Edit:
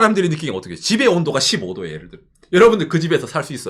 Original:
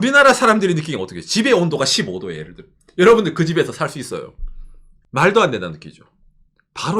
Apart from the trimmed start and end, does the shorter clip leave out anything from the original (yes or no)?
no